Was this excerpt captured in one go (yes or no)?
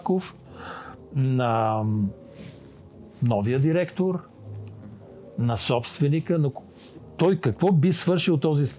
yes